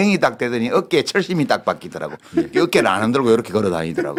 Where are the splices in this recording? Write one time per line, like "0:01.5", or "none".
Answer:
none